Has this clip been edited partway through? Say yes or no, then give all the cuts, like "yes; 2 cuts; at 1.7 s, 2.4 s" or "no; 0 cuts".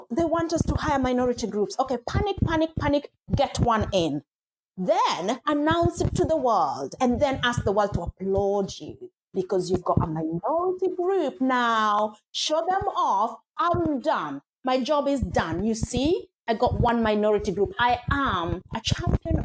no; 0 cuts